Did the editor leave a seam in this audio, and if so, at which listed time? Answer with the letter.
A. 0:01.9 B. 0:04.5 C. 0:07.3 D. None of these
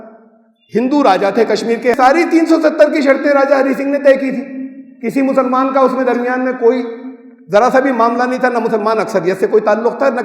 A